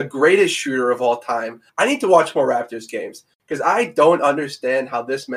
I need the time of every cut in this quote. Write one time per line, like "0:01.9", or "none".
none